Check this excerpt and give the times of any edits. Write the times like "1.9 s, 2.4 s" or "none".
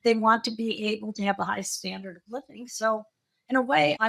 none